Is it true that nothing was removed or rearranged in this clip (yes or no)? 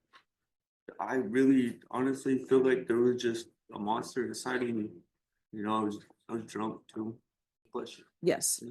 no